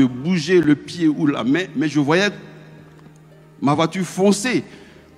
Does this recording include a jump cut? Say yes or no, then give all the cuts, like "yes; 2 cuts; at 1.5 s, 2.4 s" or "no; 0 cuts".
no; 0 cuts